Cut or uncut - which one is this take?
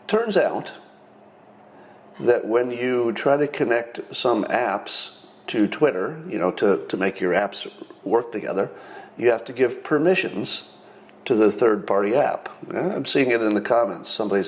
uncut